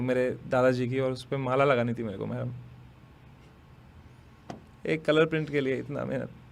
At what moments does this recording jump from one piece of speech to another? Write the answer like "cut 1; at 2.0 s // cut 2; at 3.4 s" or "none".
none